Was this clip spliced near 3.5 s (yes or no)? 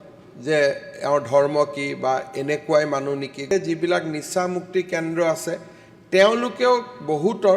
yes